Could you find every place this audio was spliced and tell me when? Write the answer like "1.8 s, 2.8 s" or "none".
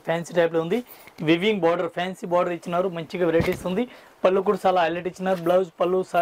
none